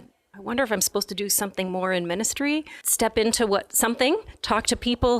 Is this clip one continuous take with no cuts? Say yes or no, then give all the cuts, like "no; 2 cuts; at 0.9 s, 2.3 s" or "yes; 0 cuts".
no; 1 cut; at 2.8 s